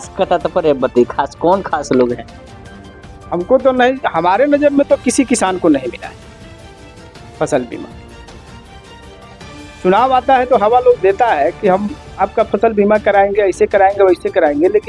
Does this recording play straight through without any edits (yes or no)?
yes